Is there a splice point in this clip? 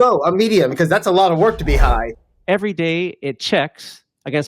yes; 1 cut; at 2.1 s

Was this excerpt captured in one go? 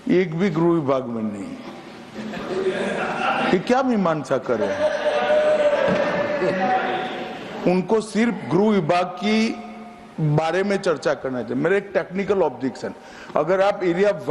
yes; 0 cuts

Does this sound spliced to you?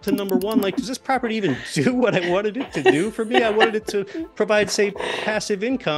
no; 0 cuts

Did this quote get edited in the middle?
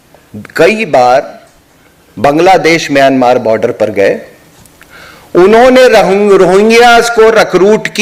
no; 0 cuts

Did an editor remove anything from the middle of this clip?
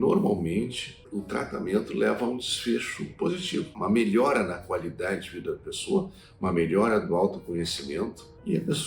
no; 0 cuts

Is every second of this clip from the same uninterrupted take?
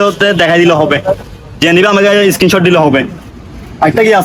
yes; 0 cuts

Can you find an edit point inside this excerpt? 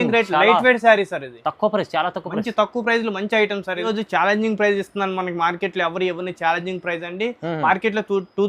yes; 1 cut; at 3.8 s

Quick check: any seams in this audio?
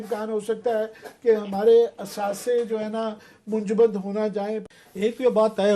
yes; 1 cut; at 4.6 s

